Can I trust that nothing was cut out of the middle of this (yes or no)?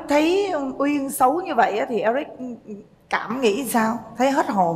yes